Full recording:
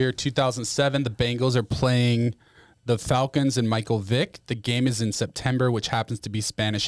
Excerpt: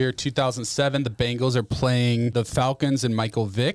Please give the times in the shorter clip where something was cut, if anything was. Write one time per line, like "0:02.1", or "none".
0:02.3